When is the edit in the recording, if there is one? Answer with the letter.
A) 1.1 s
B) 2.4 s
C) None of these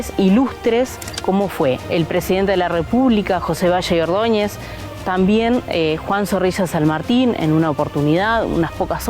A